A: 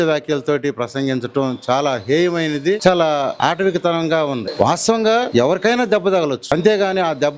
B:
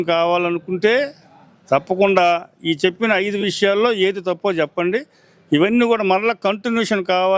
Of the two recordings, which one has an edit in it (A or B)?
A